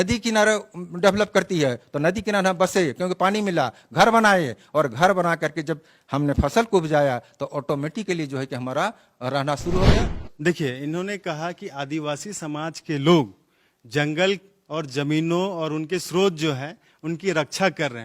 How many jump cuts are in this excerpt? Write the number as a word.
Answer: one